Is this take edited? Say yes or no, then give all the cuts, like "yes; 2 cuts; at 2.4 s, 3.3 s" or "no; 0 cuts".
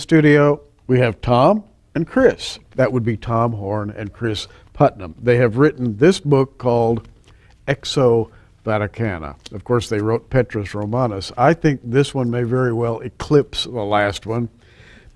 yes; 1 cut; at 3.8 s